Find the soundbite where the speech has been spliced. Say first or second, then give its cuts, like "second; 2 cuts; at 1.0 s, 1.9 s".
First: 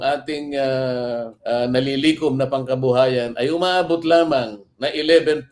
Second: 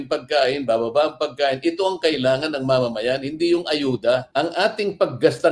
second; 1 cut; at 4.3 s